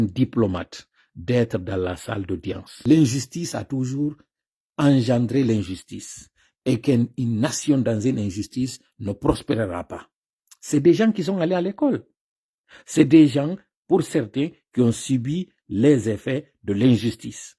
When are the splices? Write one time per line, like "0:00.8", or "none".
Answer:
0:02.7